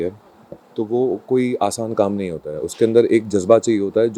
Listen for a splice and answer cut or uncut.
uncut